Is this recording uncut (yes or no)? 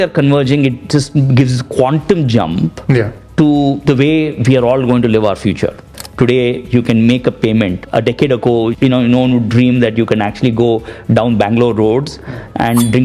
no